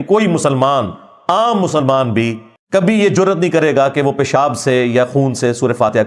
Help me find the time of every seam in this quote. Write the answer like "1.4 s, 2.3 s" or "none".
none